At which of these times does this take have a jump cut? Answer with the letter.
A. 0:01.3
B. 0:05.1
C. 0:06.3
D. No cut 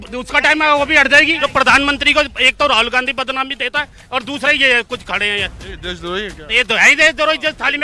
A